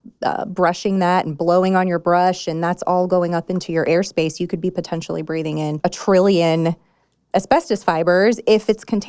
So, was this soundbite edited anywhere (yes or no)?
yes